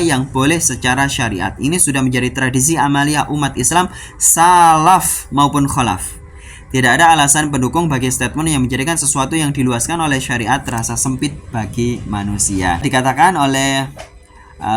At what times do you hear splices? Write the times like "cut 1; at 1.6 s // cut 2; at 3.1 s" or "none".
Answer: cut 1; at 12.8 s